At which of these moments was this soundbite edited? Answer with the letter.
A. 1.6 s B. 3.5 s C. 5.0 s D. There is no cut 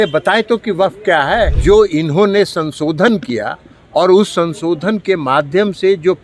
A